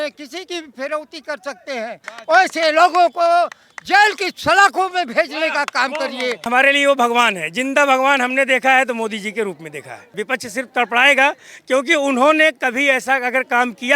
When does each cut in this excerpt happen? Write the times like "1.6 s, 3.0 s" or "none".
2.1 s, 6.5 s, 10.1 s